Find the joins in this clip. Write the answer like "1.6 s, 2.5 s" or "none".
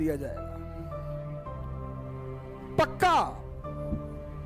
3.3 s